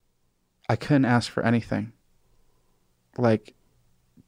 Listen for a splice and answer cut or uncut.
uncut